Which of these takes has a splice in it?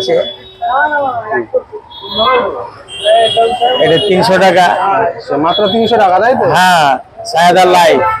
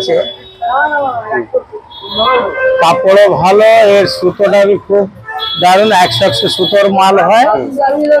second; 1 cut; at 2.5 s

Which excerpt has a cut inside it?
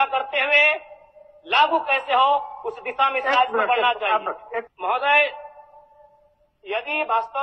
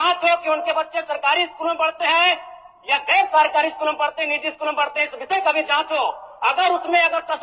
first; 1 cut; at 4.7 s

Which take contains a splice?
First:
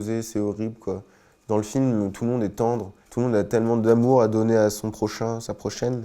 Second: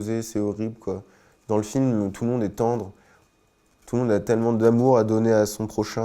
first; 1 cut; at 3.0 s

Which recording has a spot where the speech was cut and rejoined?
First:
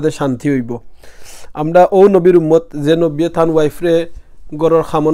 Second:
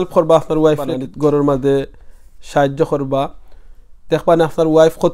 second; 1 cut; at 1.0 s

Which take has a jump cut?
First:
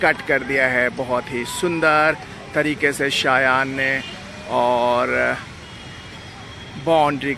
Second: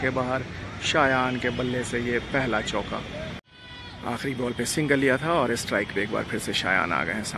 second; 1 cut; at 3.5 s

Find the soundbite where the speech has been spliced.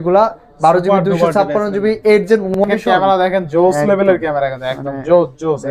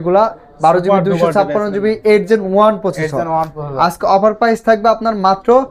first; 1 cut; at 2.6 s

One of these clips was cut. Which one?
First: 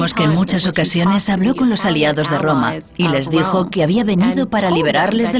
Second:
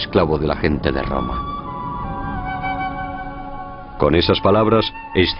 first; 1 cut; at 1.4 s

